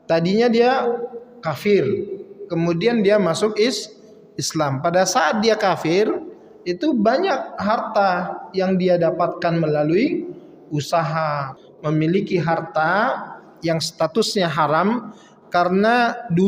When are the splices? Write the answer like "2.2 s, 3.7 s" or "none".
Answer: 11.6 s